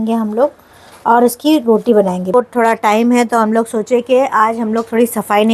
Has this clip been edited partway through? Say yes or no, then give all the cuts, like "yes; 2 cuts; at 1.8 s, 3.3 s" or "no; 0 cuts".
yes; 1 cut; at 2.3 s